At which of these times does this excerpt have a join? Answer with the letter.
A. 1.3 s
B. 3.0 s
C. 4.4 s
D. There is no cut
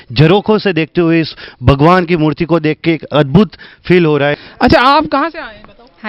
C